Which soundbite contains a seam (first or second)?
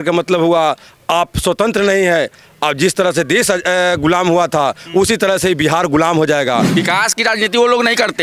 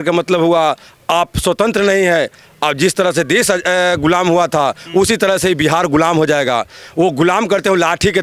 first